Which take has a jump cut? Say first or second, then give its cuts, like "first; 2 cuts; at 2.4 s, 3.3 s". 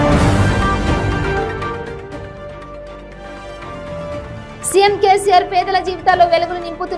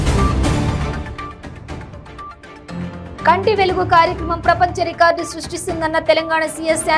second; 1 cut; at 3.2 s